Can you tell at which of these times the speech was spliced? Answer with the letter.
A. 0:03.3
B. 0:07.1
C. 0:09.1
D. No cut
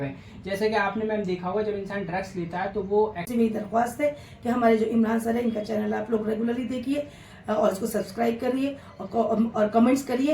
A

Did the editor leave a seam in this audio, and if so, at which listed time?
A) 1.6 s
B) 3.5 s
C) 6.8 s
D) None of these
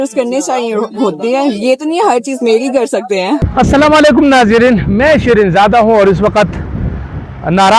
B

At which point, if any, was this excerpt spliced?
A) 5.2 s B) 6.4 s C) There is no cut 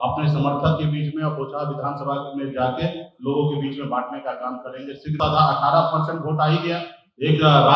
A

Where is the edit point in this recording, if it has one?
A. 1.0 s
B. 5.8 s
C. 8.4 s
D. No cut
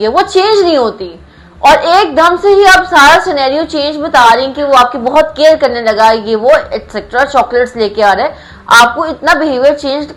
D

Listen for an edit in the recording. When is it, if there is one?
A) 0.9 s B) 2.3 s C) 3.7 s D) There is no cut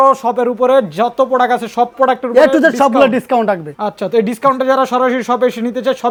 D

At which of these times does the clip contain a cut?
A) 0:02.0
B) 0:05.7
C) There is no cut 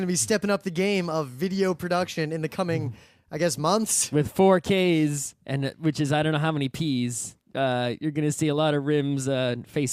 C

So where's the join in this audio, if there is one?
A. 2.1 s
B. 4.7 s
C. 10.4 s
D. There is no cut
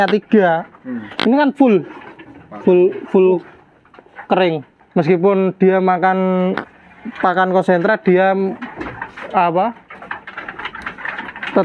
B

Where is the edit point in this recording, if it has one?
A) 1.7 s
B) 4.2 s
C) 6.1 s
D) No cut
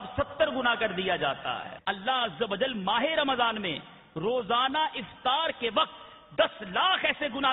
A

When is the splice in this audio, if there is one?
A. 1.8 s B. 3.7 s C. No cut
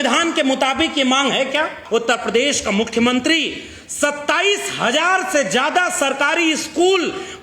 A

